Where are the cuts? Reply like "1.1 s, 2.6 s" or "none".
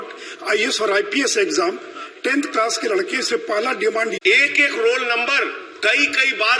4.1 s